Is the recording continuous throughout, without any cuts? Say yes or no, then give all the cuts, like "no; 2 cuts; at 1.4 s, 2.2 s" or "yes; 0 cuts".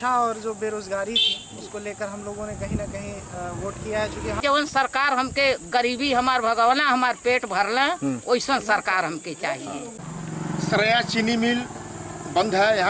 no; 2 cuts; at 4.4 s, 10.0 s